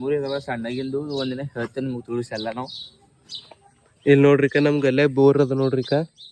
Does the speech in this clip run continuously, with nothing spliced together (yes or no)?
yes